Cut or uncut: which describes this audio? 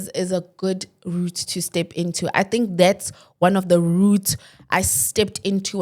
uncut